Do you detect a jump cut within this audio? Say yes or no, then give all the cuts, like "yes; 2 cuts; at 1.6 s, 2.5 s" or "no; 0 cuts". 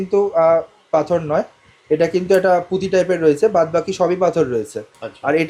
no; 0 cuts